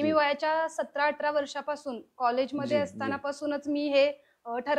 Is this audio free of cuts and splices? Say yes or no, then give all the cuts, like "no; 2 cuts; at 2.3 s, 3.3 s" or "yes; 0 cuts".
yes; 0 cuts